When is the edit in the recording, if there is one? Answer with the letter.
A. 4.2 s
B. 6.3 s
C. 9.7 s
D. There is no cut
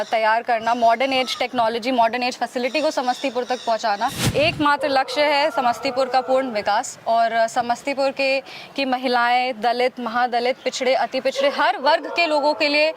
A